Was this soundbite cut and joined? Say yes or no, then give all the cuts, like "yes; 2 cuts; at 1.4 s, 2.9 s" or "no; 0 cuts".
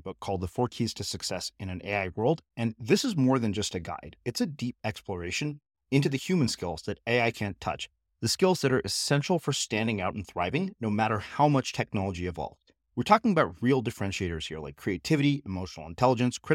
no; 0 cuts